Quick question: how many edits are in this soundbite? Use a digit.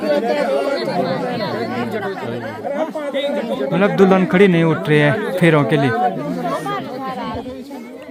0